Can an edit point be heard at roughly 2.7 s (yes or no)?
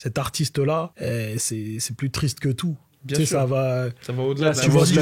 no